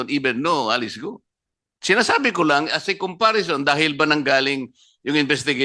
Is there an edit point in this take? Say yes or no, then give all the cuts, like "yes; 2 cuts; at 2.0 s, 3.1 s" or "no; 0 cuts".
no; 0 cuts